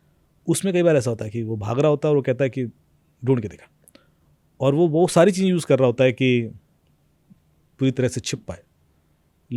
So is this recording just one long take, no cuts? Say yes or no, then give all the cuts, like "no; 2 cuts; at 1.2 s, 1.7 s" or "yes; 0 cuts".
yes; 0 cuts